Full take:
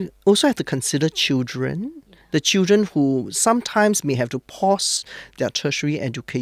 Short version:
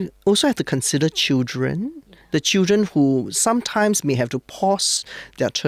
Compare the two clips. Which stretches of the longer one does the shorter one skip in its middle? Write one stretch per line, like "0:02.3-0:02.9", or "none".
none